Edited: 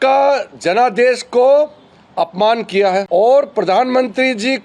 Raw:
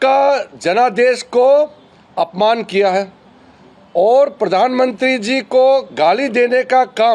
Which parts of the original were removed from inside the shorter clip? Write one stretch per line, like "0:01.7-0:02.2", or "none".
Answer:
0:03.1-0:03.9